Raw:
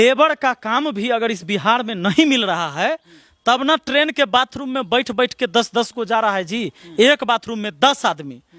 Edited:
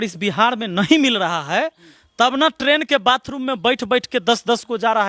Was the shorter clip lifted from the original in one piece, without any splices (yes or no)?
yes